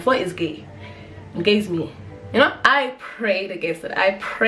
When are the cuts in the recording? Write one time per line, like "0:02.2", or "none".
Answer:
0:02.6